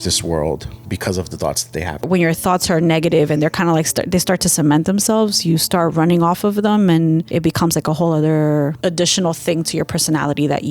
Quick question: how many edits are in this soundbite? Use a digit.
3